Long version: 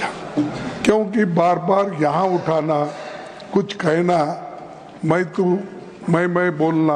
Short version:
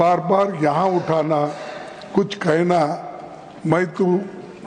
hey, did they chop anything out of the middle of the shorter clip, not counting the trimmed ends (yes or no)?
no